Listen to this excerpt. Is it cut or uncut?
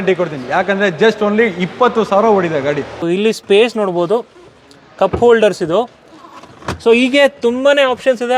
cut